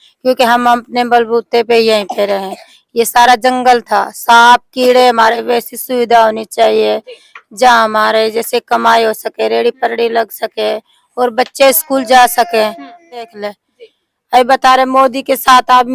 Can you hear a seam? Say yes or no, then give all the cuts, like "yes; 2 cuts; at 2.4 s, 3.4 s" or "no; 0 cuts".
yes; 2 cuts; at 5.4 s, 13.4 s